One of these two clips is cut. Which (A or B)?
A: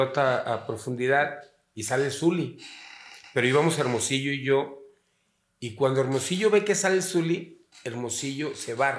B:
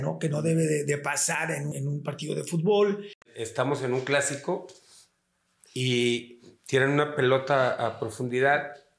B